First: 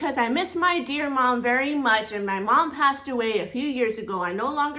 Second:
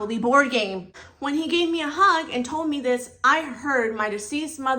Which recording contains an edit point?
second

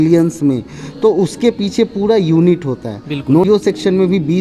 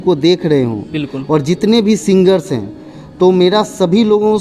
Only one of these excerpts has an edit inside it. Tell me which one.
first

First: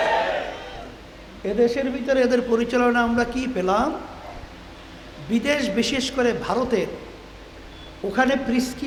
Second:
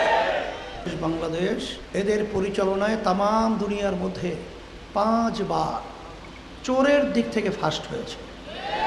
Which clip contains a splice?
second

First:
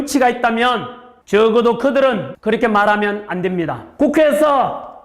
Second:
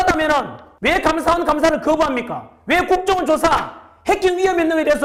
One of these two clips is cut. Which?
first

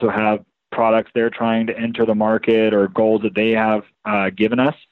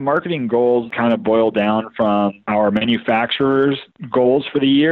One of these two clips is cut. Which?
second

